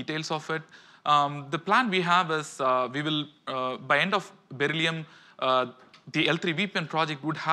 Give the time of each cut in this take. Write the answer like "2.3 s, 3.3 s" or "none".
4.3 s